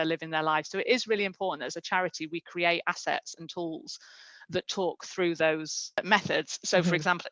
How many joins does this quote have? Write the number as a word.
one